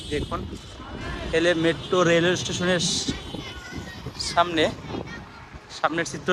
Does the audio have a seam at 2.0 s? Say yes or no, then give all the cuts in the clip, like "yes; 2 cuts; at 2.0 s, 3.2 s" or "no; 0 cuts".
no; 0 cuts